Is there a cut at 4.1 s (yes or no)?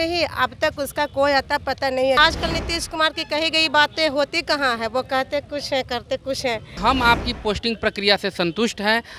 no